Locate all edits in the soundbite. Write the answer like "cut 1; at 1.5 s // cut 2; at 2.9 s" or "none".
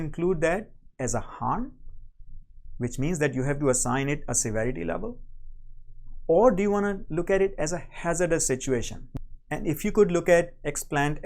cut 1; at 9.0 s